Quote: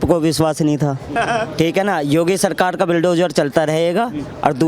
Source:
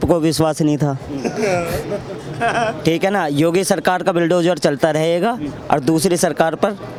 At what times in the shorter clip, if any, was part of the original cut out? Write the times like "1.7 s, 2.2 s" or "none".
1.0 s